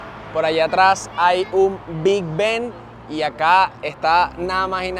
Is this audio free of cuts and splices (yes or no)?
yes